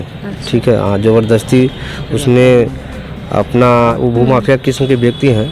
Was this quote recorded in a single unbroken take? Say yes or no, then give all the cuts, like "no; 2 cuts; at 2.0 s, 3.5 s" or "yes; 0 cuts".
no; 1 cut; at 3.9 s